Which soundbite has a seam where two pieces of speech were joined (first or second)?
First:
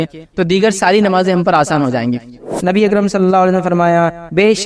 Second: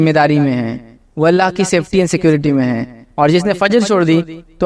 first